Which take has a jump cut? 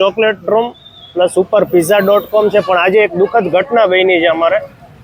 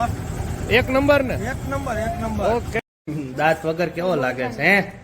second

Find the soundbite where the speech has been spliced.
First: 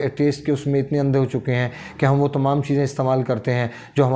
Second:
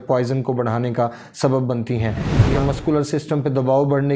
second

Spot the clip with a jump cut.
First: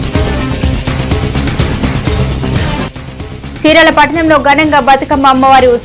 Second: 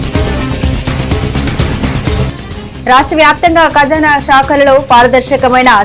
first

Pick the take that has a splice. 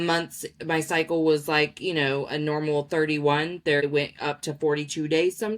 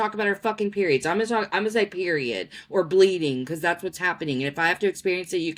first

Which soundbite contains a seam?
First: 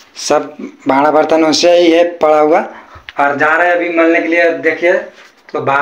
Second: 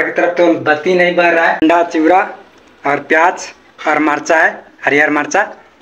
second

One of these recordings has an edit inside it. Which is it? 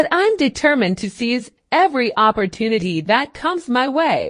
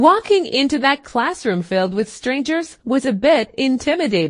first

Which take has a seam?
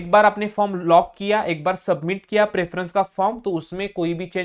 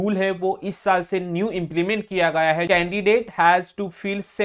second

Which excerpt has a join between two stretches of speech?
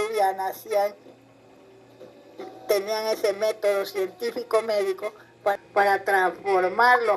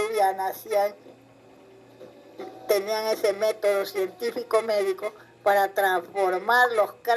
second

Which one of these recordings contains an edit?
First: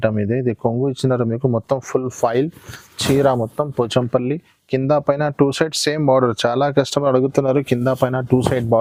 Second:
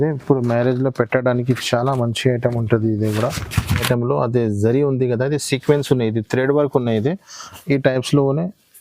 second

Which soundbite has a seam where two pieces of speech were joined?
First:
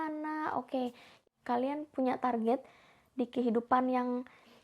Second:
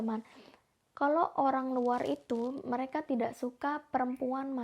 first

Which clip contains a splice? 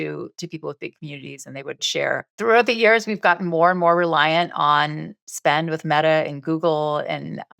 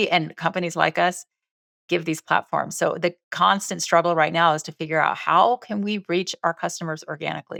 first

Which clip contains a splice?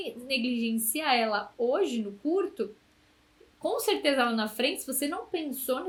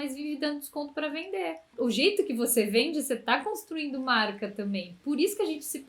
second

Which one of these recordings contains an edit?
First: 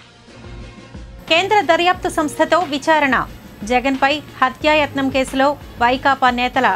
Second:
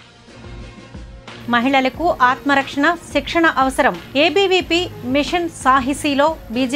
first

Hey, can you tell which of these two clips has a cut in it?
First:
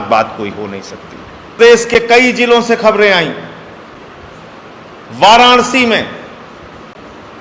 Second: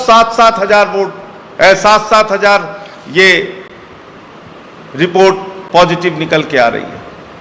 first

